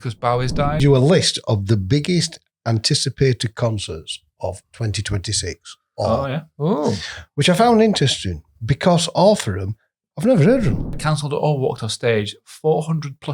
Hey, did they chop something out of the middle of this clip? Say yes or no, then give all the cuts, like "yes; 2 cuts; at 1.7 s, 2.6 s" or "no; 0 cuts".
yes; 2 cuts; at 0.8 s, 11.0 s